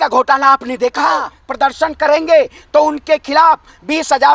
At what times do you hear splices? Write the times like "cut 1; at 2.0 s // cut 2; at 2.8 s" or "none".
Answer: cut 1; at 1.4 s